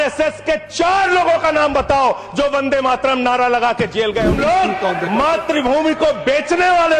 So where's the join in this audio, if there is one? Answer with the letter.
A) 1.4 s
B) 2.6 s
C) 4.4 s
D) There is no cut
C